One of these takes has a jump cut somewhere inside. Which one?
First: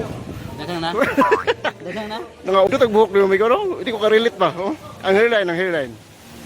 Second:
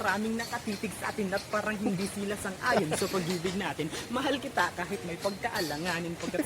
first; 1 cut; at 2.7 s

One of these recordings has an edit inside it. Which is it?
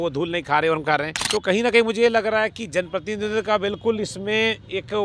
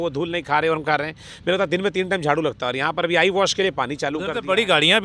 first; 1 cut; at 1.2 s

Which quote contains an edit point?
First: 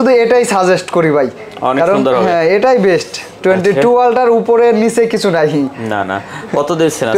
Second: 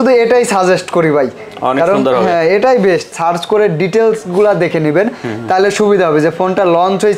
second; 1 cut; at 3.2 s

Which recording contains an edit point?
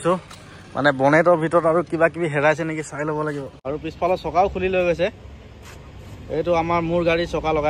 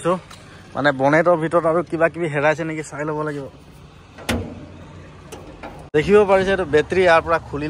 first; 1 cut; at 3.5 s

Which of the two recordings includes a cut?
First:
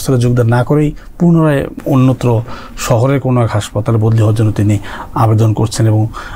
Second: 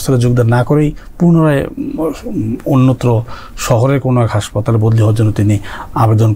first; 1 cut; at 1.8 s

